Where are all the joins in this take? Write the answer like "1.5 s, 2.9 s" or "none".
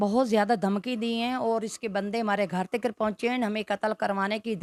none